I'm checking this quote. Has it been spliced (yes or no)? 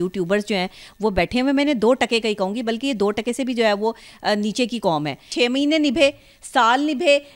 yes